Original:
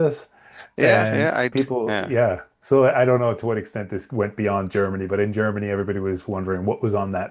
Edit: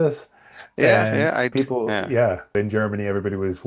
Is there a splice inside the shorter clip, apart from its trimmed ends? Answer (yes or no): yes